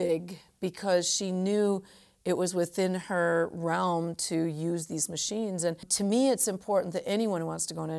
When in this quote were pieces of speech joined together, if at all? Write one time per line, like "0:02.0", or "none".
0:05.9